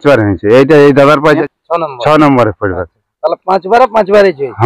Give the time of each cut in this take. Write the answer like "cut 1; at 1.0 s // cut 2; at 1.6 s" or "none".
cut 1; at 1.4 s